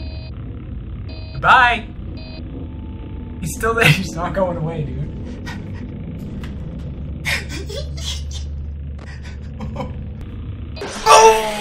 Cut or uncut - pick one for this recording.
cut